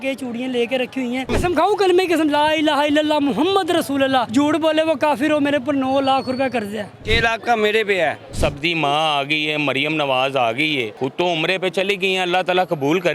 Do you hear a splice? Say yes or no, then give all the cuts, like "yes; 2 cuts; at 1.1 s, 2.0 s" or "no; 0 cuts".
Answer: yes; 5 cuts; at 1.3 s, 4.3 s, 7.0 s, 8.3 s, 10.9 s